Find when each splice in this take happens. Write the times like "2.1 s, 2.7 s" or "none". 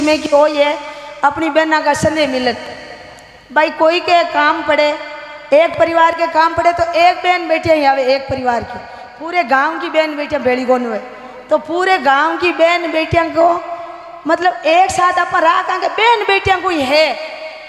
none